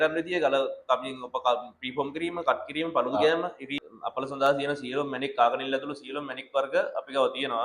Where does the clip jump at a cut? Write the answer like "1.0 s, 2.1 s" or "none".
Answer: 3.8 s